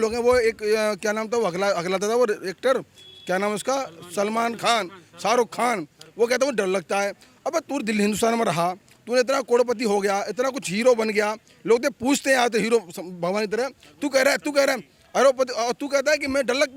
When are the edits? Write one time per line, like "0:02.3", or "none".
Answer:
none